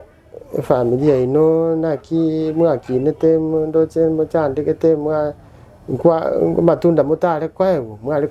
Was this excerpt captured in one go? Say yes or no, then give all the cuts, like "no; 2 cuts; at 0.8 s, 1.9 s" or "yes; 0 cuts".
yes; 0 cuts